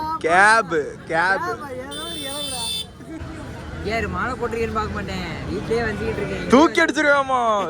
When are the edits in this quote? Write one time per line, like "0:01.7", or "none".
0:03.2